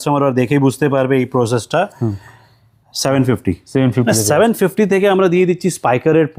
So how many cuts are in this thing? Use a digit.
0